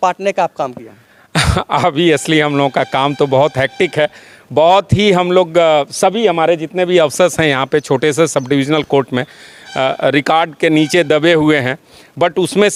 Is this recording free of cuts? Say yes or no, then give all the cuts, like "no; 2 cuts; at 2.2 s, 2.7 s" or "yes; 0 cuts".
yes; 0 cuts